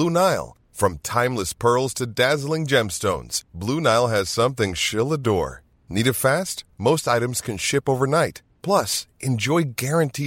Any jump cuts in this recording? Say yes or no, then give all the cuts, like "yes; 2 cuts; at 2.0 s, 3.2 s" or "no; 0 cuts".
no; 0 cuts